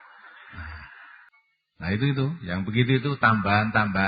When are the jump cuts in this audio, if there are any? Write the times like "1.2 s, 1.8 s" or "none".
1.3 s